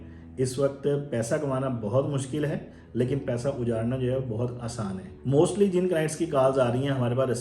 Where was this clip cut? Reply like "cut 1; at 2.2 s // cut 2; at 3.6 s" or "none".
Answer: cut 1; at 5.1 s